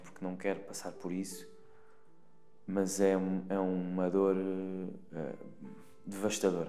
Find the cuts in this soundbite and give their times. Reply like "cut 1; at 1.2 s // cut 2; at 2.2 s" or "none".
none